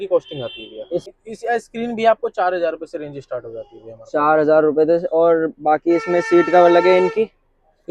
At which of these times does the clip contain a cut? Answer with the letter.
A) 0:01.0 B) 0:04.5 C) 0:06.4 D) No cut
A